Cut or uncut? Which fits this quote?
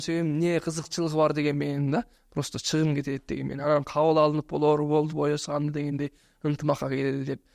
uncut